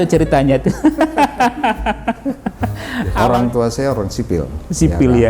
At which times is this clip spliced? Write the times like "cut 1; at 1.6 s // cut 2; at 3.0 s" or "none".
cut 1; at 3.1 s